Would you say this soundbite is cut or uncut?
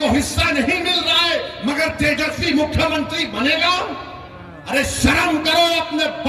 uncut